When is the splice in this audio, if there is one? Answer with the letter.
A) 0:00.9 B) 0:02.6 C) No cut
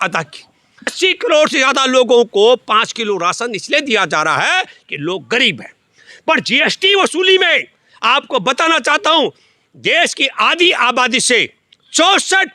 A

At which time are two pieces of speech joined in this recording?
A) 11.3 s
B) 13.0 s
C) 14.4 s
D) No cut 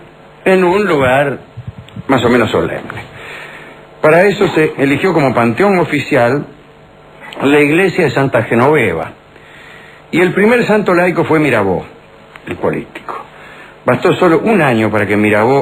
A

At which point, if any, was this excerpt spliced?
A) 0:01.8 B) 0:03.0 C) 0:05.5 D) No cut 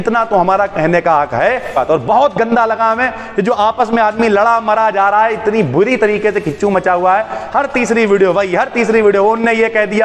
A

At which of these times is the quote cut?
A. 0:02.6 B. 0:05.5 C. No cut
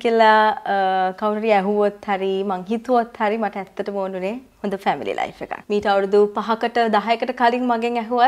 B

